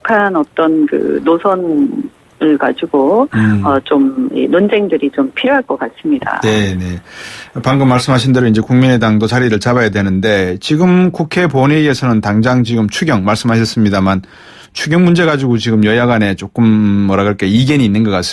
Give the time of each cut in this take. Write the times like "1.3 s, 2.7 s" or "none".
15.5 s